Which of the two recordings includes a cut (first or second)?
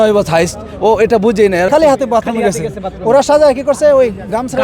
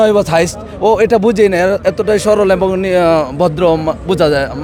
first